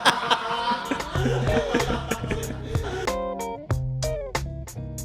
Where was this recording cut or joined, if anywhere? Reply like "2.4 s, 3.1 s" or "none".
3.0 s